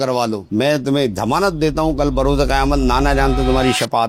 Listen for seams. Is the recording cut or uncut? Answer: uncut